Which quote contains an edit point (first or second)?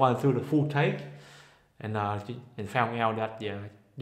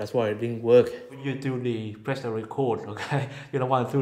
second